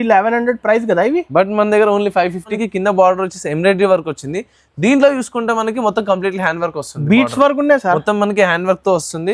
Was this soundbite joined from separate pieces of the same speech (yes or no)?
yes